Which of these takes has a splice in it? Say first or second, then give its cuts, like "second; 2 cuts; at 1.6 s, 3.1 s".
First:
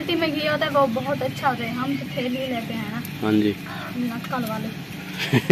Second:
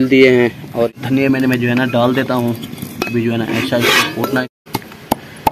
second; 2 cuts; at 0.9 s, 4.4 s